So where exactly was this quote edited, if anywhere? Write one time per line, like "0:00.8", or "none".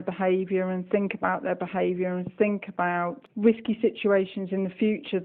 0:03.2